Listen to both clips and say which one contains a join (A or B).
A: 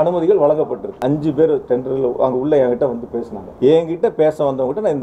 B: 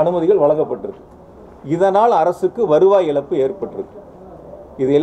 A